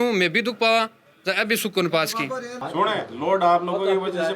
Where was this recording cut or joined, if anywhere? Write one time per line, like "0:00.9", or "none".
0:02.6